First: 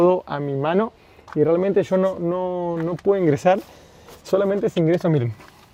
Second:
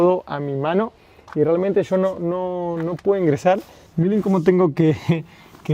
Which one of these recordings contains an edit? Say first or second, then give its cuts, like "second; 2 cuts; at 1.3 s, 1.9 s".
second; 1 cut; at 3.8 s